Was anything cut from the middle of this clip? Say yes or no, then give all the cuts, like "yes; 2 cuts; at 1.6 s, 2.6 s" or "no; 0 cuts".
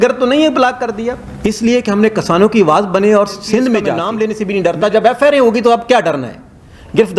yes; 2 cuts; at 1.2 s, 4.0 s